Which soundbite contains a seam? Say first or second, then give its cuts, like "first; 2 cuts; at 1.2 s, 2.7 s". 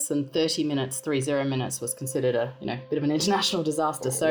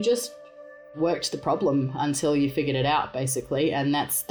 second; 1 cut; at 0.9 s